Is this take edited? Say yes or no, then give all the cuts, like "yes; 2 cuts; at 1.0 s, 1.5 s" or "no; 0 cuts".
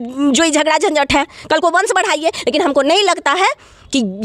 no; 0 cuts